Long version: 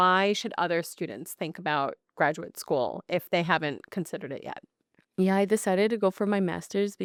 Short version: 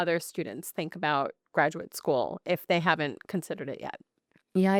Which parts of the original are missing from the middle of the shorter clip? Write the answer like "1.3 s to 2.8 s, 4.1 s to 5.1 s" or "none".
none